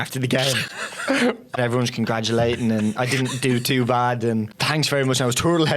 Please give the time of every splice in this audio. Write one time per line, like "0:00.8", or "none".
0:01.6
0:04.6